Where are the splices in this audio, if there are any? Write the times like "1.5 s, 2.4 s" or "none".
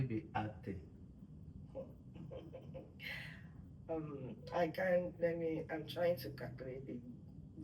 none